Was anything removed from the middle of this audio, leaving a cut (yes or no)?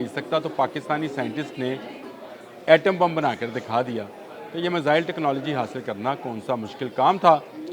no